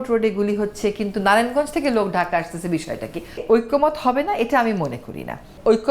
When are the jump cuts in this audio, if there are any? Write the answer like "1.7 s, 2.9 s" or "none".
3.4 s